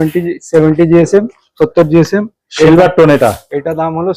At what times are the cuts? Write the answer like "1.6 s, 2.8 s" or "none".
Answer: none